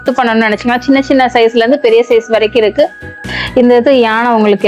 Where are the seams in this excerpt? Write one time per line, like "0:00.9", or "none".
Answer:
0:03.4